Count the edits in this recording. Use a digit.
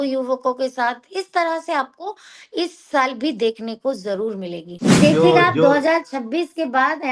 1